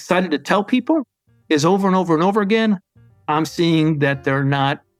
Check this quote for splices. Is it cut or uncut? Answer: uncut